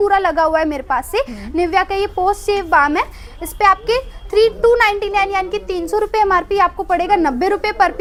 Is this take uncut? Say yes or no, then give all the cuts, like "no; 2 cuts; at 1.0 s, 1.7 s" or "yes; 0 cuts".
yes; 0 cuts